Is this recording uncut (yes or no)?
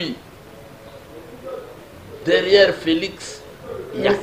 yes